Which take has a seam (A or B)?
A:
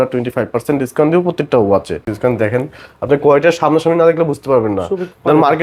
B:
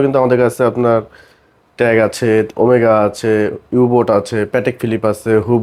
A